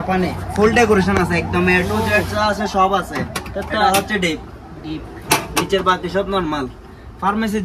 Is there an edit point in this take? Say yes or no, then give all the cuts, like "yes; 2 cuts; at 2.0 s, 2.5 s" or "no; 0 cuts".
no; 0 cuts